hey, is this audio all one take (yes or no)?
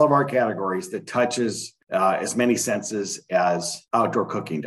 no